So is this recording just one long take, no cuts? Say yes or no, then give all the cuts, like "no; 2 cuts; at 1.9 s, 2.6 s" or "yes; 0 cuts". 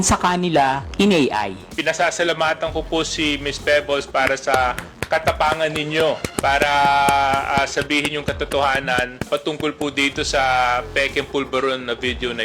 no; 3 cuts; at 1.7 s, 6.3 s, 9.3 s